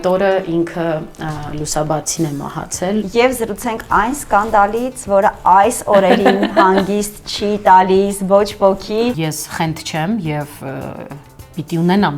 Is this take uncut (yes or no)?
no